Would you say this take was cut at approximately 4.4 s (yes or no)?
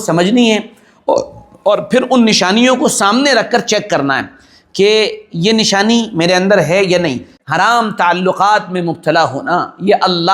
no